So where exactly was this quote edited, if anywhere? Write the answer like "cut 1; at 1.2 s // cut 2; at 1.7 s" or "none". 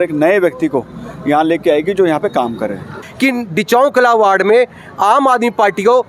cut 1; at 3.0 s